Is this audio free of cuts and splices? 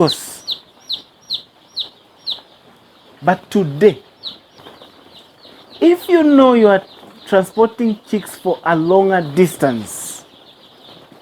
no; 1 cut; at 4.6 s

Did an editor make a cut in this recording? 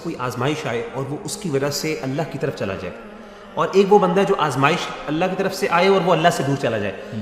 no; 0 cuts

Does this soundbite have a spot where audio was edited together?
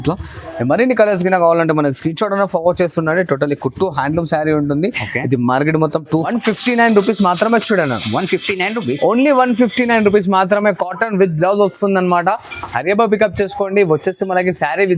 yes; 1 cut; at 6.3 s

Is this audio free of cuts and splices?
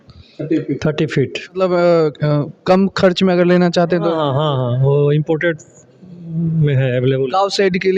no; 1 cut; at 1.6 s

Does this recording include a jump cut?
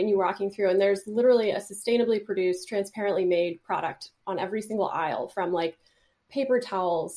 no; 0 cuts

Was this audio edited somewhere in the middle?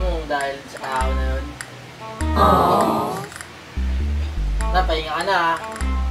no; 0 cuts

